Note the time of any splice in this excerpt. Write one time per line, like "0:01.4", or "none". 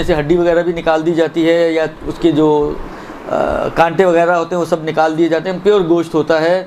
0:04.4